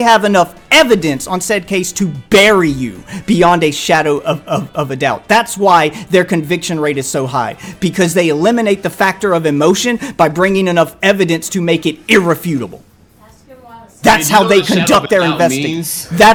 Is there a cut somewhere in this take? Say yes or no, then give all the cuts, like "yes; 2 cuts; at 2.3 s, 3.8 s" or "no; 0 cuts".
no; 0 cuts